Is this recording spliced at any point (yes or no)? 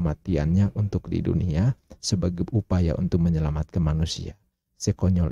no